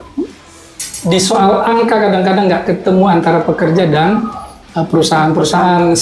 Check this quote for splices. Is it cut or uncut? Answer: uncut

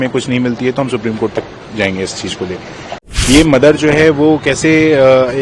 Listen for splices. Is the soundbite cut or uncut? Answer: cut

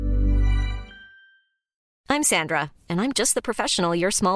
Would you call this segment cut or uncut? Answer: cut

